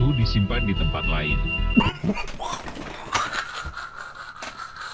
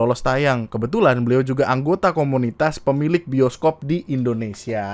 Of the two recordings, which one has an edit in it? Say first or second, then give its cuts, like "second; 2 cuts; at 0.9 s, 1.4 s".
first; 1 cut; at 1.7 s